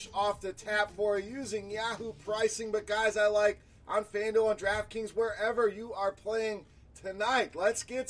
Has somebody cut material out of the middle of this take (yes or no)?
no